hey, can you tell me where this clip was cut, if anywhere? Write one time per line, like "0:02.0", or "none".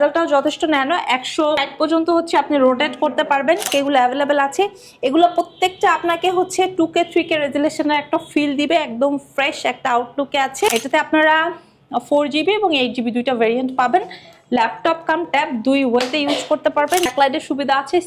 0:01.6
0:03.7
0:10.7
0:17.1